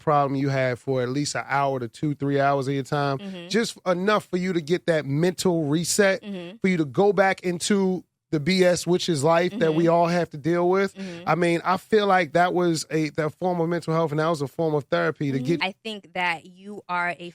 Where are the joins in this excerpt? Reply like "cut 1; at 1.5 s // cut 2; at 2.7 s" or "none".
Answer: cut 1; at 15.6 s